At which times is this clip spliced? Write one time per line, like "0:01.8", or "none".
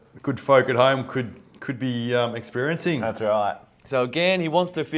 0:03.7